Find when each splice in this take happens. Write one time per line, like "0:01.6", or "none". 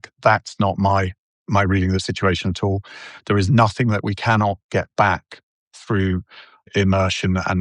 none